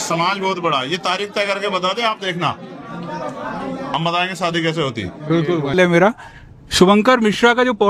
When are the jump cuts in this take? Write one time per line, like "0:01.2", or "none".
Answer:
0:05.7